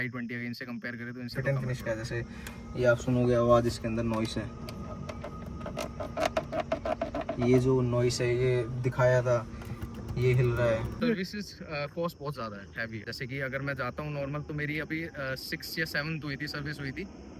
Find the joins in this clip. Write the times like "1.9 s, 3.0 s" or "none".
1.4 s, 11.0 s, 13.1 s